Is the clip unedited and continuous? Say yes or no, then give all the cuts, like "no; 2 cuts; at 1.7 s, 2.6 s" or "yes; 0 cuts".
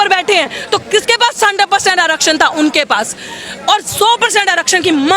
yes; 0 cuts